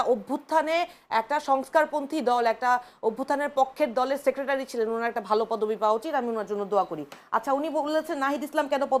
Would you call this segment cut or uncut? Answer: uncut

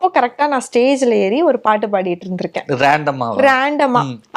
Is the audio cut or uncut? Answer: uncut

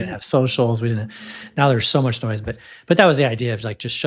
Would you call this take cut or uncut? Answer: uncut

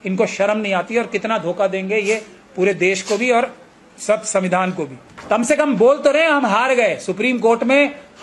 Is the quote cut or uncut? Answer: cut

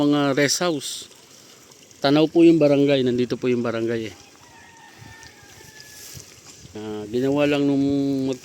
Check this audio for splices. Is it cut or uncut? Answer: cut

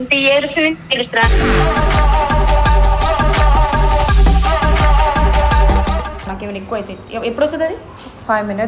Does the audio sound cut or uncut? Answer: cut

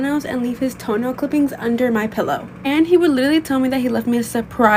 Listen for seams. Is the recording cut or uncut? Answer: uncut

